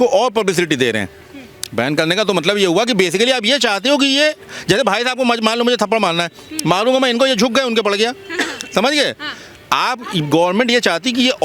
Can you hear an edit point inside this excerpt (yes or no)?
no